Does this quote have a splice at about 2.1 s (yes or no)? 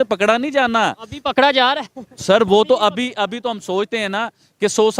no